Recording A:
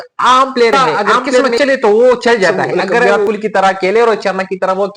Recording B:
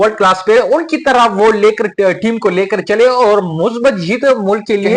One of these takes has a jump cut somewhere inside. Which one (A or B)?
A